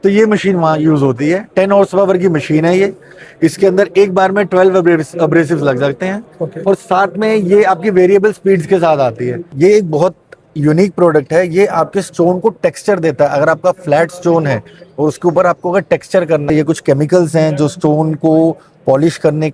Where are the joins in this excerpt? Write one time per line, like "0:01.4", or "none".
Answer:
0:09.5
0:16.4